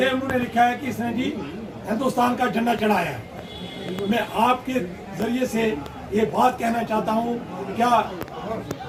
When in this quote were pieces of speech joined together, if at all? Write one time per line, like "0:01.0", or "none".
none